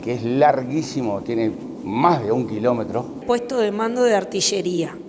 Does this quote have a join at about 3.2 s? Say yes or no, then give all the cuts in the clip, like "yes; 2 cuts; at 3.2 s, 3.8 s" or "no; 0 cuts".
yes; 1 cut; at 3.2 s